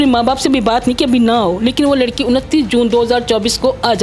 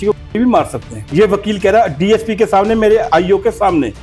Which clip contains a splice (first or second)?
second